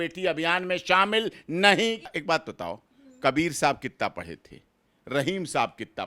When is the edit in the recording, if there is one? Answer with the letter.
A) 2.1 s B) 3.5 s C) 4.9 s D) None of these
A